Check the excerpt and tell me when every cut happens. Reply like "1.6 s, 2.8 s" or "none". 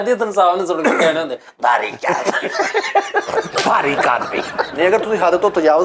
4.7 s